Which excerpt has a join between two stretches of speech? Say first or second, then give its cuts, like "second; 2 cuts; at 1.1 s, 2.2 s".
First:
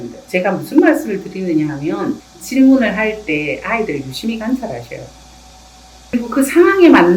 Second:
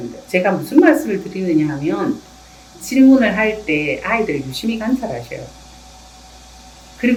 first; 2 cuts; at 2.3 s, 6.1 s